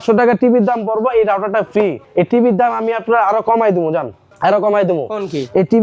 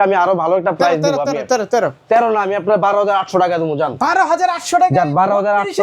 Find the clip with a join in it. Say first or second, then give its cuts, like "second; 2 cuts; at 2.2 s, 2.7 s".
first; 2 cuts; at 2.0 s, 4.2 s